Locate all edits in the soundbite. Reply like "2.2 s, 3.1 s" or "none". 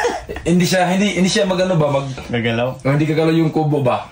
2.3 s